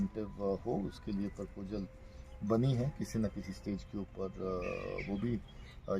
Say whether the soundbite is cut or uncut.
uncut